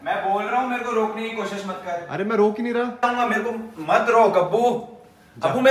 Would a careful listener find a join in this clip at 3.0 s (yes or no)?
yes